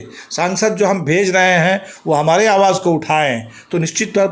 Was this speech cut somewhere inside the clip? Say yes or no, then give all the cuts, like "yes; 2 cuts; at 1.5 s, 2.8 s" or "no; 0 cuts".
no; 0 cuts